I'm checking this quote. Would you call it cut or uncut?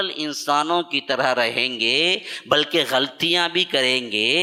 uncut